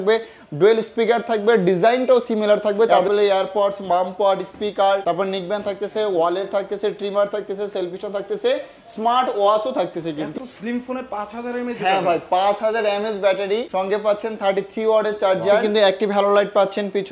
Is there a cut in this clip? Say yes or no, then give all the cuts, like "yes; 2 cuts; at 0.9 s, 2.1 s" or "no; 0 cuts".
yes; 3 cuts; at 3.1 s, 10.3 s, 15.7 s